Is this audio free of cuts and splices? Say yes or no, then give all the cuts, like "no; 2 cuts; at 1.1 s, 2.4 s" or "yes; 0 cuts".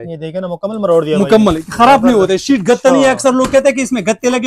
yes; 0 cuts